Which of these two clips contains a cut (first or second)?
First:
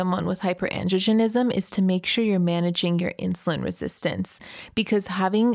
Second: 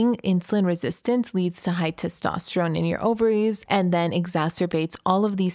second